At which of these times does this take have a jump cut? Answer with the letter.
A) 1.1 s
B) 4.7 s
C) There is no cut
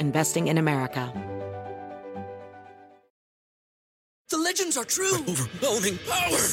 A